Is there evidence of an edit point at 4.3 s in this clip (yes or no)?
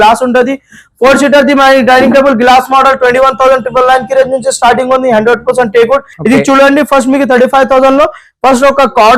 no